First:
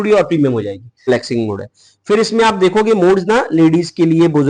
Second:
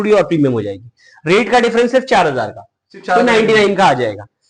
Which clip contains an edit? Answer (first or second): first